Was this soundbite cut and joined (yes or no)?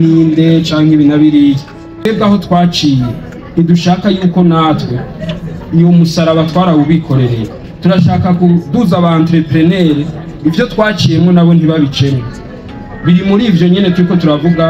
yes